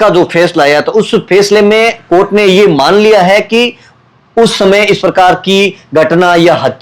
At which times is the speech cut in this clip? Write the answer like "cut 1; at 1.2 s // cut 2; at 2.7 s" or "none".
none

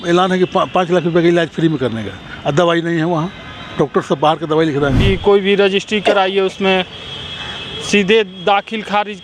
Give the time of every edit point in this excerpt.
cut 1; at 5.0 s

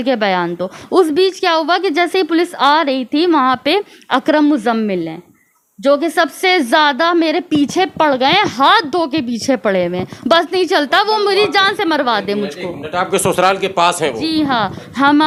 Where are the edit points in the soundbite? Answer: none

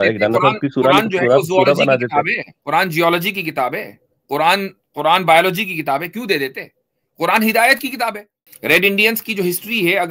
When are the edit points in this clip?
cut 1; at 8.5 s

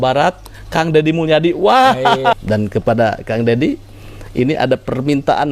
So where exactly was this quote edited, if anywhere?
cut 1; at 2.4 s

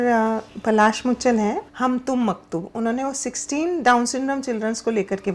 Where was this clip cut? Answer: cut 1; at 1.7 s

